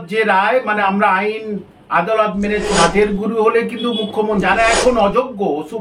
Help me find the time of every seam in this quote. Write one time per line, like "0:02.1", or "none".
0:02.7
0:04.4